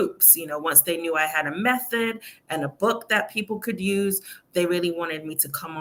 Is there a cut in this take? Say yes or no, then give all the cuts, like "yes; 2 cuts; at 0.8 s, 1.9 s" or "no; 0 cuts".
no; 0 cuts